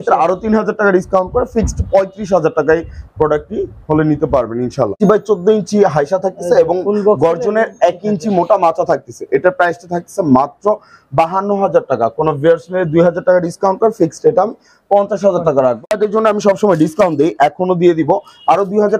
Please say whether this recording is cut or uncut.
cut